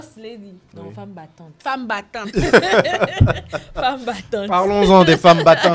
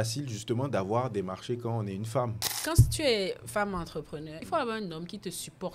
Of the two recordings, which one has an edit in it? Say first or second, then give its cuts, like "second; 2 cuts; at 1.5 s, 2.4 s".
second; 2 cuts; at 2.6 s, 4.3 s